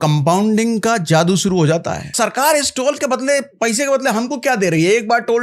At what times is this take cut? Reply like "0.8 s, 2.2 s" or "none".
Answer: 2.1 s